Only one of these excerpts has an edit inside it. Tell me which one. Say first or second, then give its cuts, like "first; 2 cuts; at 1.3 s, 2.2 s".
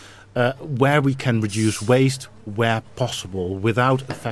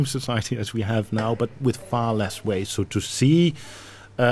second; 1 cut; at 2.7 s